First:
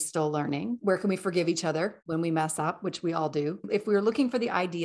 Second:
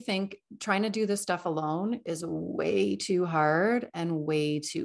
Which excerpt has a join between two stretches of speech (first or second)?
first